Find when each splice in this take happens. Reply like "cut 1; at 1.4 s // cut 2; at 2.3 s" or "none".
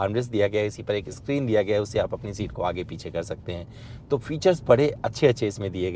none